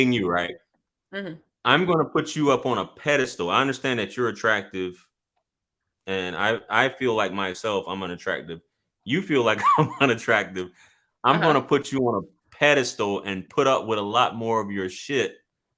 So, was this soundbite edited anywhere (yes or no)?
no